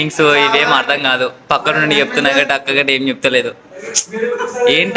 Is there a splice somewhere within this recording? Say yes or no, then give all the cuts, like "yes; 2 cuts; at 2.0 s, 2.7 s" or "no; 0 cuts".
no; 0 cuts